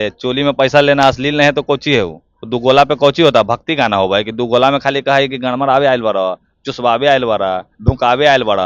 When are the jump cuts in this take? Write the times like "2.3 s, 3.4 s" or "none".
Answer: none